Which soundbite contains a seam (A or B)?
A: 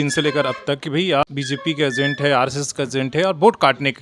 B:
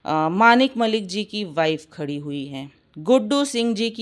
A